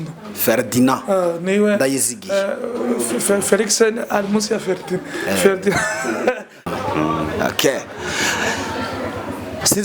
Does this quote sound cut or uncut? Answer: cut